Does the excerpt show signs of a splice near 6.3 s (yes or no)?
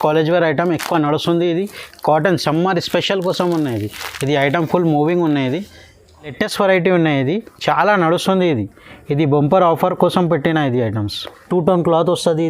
yes